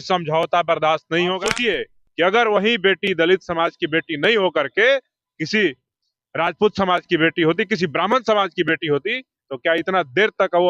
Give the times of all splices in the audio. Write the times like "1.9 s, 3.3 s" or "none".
1.5 s